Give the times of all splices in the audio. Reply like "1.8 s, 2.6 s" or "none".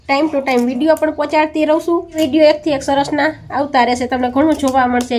2.1 s